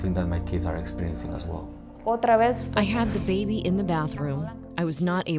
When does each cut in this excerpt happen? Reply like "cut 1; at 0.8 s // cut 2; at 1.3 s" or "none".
cut 1; at 2.2 s